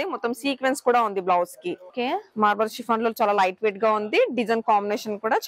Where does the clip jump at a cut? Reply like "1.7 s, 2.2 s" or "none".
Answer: 1.9 s